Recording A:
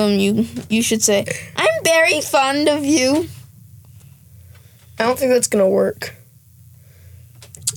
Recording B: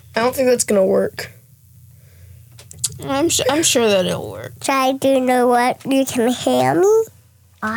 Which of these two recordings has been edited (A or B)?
B